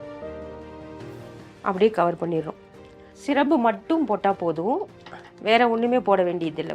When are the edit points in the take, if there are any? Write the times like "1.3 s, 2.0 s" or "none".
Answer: 1.4 s